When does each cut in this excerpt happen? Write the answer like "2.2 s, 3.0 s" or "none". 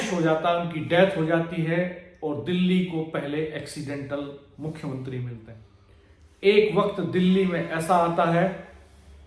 5.5 s